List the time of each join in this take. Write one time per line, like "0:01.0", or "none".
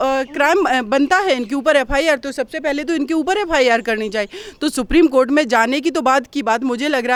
none